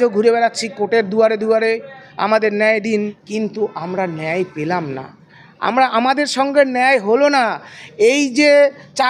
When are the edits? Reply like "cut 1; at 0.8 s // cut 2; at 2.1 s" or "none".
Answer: cut 1; at 3.2 s